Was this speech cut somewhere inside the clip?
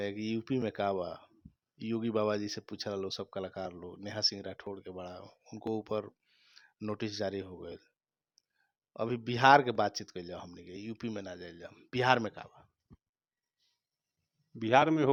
no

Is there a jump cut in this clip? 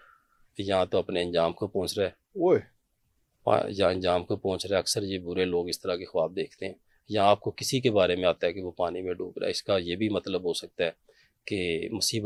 no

